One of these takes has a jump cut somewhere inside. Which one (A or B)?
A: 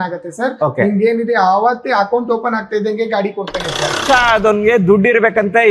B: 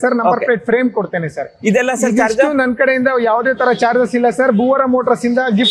A